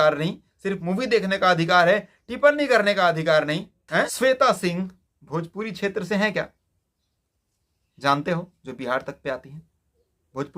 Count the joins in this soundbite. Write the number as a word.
one